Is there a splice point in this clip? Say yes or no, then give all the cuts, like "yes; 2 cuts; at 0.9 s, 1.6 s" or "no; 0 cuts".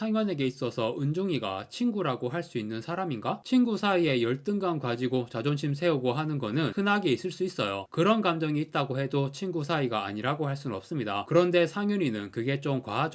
no; 0 cuts